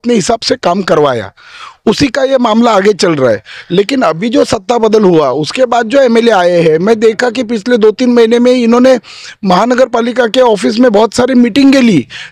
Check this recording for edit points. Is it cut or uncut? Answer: uncut